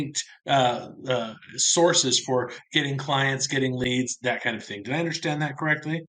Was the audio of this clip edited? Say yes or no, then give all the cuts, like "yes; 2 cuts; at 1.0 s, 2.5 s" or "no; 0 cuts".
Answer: no; 0 cuts